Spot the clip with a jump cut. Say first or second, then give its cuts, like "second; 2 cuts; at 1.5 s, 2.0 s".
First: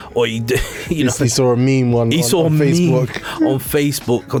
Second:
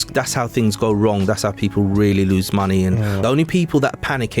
second; 1 cut; at 3.2 s